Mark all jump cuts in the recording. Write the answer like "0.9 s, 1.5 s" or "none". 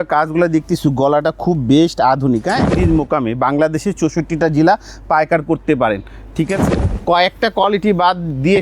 2.7 s, 6.6 s